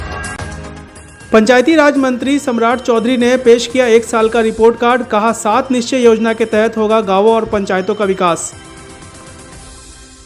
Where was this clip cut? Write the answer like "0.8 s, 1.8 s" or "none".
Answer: none